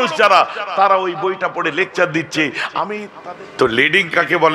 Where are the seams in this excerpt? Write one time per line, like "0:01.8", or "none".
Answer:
0:03.1